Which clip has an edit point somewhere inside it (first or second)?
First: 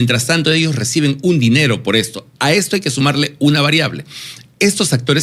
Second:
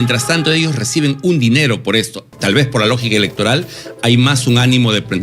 second